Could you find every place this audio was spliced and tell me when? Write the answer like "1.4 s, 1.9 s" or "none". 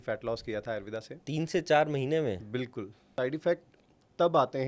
3.0 s